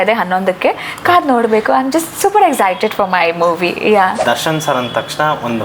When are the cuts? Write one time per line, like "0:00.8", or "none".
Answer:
0:04.2

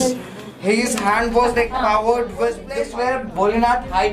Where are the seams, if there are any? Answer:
0:02.7

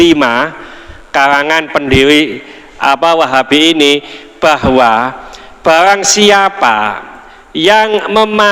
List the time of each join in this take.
none

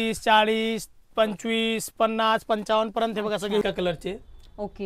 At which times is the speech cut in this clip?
0:03.6

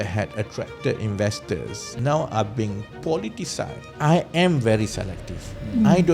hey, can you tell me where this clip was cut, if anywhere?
0:01.8
0:03.8

